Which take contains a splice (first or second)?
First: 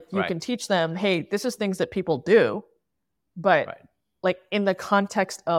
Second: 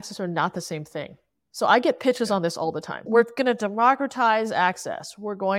second